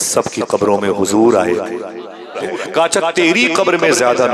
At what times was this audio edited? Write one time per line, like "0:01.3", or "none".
0:02.4